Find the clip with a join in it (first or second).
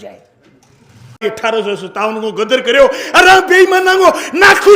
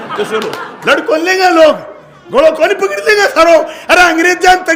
first